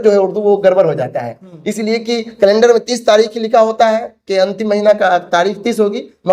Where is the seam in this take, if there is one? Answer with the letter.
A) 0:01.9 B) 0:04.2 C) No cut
C